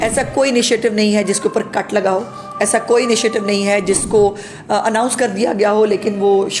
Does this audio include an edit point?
no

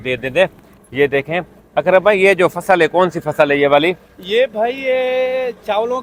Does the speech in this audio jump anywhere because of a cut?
no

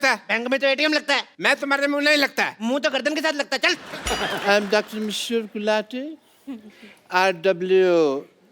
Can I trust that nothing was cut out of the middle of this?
no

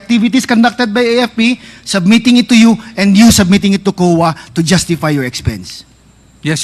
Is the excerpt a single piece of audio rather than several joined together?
yes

